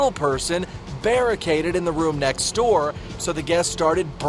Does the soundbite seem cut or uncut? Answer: cut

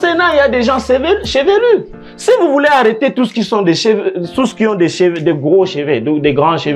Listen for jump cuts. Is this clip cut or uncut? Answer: uncut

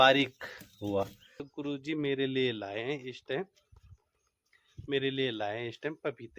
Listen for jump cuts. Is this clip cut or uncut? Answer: cut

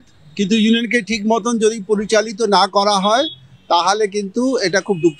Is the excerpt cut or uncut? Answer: uncut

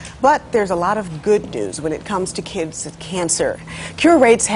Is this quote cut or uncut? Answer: cut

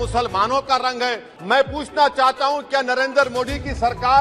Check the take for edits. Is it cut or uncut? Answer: cut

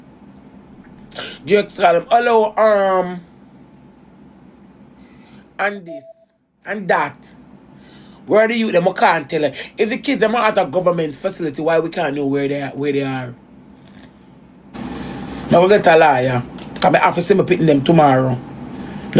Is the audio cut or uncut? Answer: cut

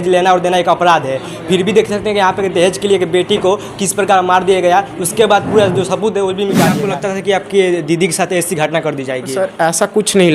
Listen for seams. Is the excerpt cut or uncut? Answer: cut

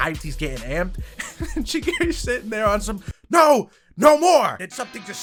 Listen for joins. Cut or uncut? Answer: uncut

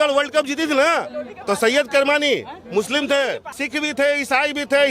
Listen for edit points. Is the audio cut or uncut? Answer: cut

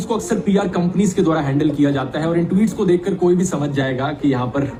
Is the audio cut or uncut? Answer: uncut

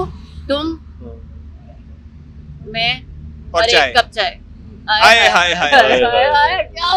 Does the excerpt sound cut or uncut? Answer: uncut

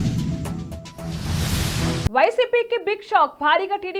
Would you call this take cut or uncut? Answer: uncut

